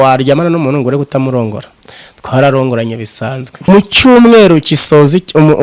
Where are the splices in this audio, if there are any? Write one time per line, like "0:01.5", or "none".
0:03.5